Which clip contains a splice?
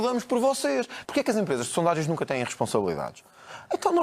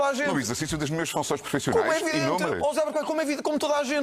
first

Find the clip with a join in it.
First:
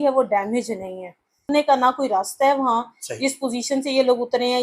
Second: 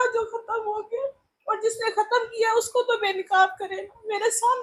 first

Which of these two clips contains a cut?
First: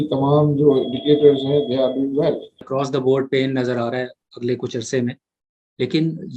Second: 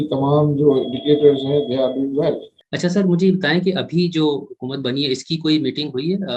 first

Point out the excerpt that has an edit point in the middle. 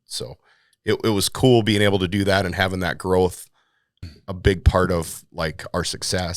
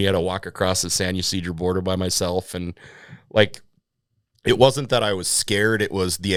first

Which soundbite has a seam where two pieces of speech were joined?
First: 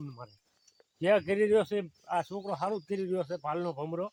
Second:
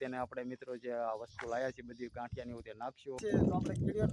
second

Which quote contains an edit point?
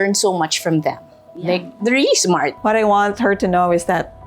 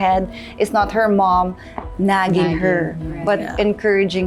first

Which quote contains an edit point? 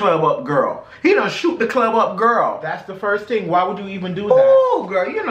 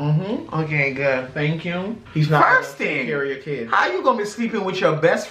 second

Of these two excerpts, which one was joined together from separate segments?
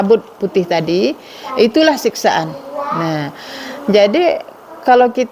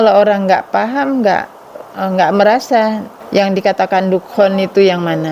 second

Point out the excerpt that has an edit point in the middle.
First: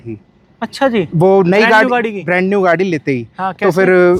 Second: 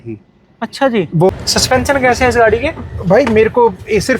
second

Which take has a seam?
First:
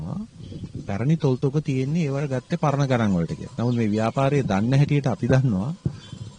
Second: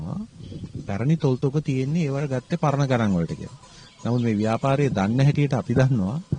first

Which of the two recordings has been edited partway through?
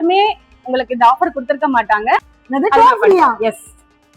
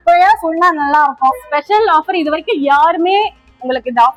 first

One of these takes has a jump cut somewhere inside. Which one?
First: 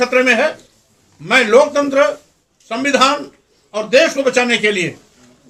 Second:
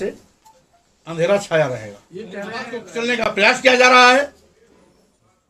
second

